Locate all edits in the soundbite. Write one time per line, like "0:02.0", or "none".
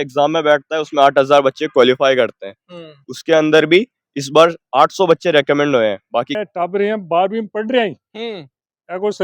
0:06.3